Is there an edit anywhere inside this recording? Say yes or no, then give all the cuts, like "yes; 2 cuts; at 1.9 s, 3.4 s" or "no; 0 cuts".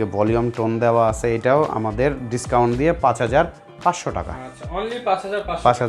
no; 0 cuts